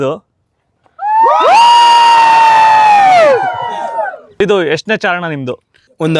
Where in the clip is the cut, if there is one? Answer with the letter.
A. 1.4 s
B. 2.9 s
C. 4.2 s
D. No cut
C